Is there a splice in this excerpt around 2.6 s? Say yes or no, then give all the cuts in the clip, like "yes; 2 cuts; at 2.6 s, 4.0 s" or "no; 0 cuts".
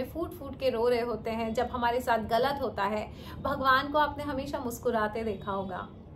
no; 0 cuts